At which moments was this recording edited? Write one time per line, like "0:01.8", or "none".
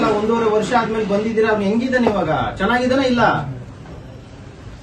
none

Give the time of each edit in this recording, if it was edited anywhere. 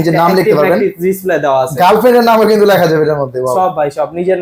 none

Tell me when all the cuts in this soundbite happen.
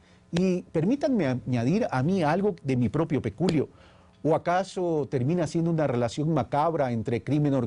0:05.2

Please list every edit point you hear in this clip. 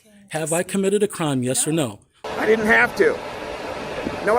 0:02.2

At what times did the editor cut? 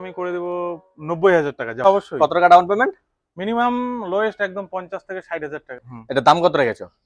0:01.8
0:05.8

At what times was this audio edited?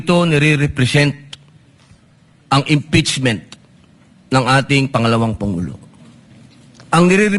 none

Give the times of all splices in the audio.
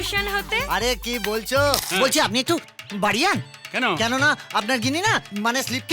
0:01.9

